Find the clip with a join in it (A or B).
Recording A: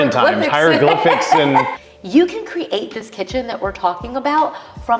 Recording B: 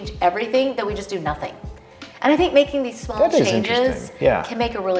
A